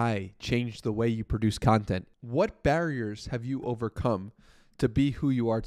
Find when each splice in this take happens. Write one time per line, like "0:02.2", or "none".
0:02.0